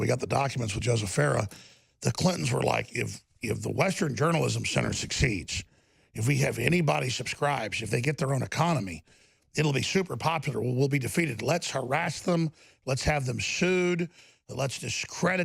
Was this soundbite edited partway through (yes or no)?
no